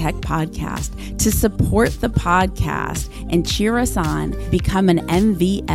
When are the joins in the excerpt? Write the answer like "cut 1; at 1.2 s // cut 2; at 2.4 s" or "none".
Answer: none